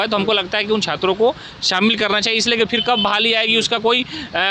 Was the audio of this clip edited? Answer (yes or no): no